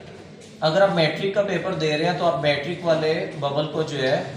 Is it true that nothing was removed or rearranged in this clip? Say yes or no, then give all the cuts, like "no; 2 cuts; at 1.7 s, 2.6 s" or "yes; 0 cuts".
yes; 0 cuts